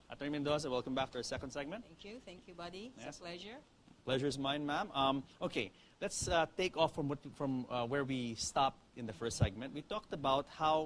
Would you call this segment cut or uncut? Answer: cut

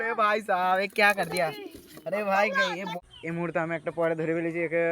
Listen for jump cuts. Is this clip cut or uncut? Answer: cut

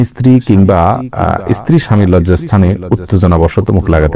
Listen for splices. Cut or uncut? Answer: uncut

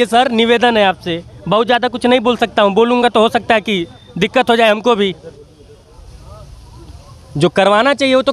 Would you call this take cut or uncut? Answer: cut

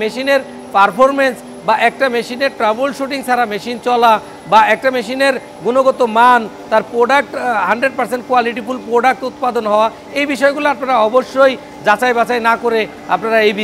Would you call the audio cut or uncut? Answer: uncut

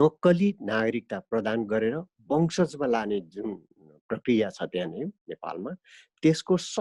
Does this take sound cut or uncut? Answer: uncut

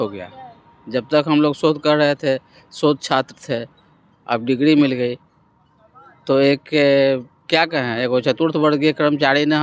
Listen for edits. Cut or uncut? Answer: uncut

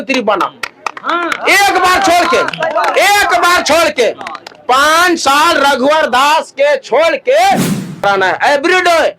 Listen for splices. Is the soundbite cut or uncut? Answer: cut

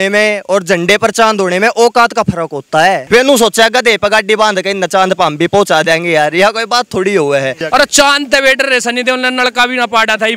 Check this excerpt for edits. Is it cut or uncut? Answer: cut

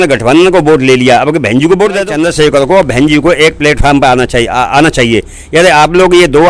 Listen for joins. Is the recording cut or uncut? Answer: cut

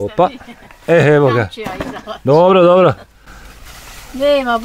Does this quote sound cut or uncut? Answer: uncut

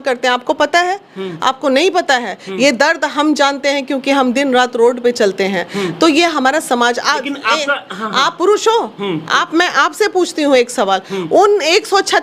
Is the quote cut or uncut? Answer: uncut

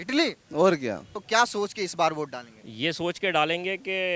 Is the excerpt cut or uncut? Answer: cut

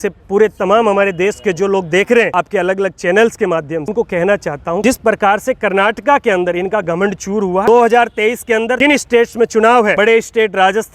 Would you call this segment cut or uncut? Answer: cut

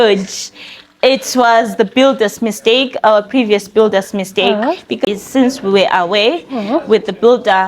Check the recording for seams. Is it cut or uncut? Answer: cut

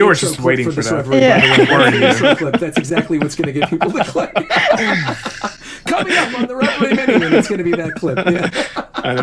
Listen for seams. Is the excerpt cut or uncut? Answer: uncut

